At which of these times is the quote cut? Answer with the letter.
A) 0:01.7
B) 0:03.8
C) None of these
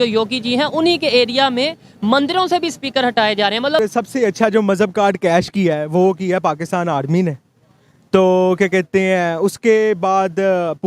B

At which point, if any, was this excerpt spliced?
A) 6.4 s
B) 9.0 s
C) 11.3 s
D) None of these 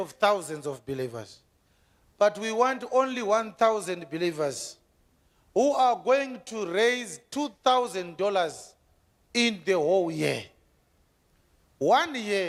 D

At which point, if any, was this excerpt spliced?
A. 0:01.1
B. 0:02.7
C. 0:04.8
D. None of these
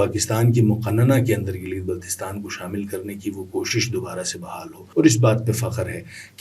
C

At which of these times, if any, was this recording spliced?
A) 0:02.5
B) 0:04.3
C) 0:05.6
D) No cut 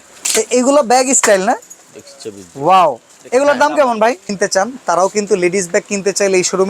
B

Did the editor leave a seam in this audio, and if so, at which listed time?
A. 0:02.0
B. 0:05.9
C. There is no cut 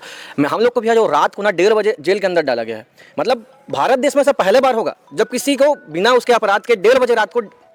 C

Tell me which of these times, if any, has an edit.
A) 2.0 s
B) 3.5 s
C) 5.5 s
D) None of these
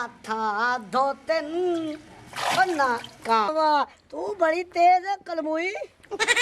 B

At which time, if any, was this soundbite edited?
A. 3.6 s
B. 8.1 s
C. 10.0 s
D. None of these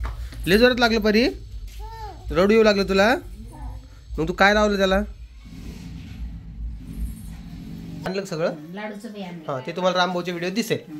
B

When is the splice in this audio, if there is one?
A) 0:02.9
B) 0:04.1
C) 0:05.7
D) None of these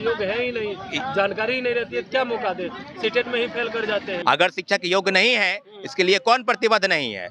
B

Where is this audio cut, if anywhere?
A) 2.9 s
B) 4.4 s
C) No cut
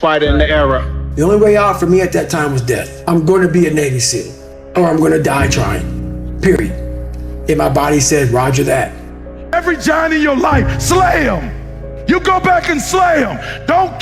A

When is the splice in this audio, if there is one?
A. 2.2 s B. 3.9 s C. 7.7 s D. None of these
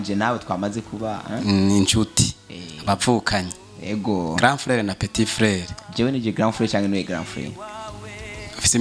D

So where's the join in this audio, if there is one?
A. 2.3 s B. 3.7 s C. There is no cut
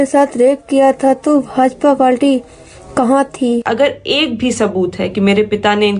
B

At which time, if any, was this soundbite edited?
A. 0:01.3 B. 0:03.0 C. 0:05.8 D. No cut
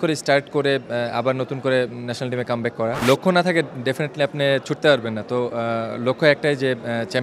B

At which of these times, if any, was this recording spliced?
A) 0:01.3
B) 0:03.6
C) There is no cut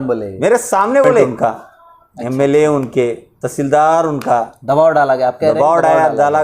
A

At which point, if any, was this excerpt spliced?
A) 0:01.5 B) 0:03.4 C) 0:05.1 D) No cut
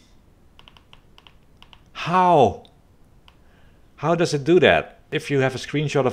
C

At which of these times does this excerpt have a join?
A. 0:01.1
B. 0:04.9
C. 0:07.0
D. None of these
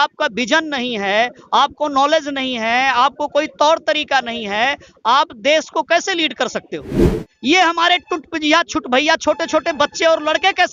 C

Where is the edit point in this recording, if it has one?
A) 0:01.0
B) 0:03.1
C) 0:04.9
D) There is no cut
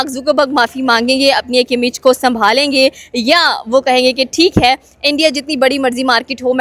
D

